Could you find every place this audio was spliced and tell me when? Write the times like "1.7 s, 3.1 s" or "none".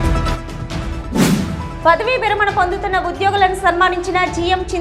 1.2 s

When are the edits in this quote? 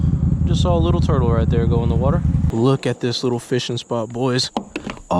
2.5 s

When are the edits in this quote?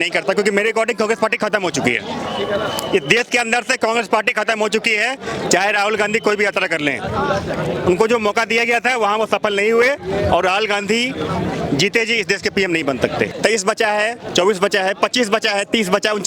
13.3 s

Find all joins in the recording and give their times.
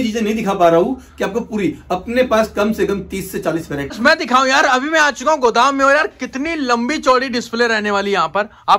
3.9 s

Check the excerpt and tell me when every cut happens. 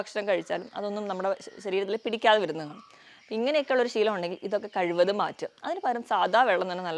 none

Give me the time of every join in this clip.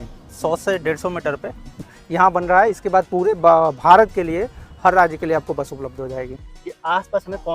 1.8 s, 6.5 s

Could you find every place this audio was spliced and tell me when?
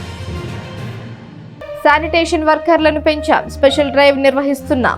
1.1 s

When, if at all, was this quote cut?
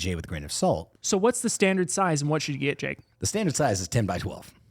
0.9 s

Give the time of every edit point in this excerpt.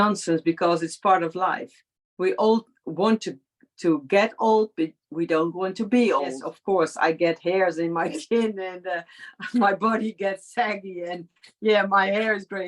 6.5 s

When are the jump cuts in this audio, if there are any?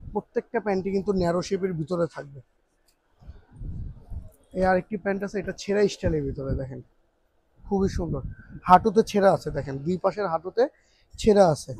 none

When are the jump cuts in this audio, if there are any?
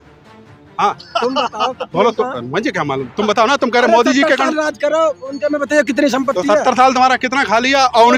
none

